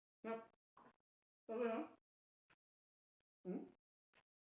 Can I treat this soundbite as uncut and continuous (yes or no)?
yes